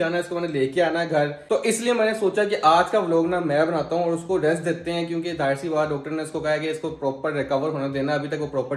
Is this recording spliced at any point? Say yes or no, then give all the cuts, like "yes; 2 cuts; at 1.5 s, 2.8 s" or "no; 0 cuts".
no; 0 cuts